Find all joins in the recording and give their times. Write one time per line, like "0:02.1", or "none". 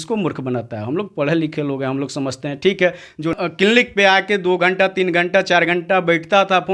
0:03.3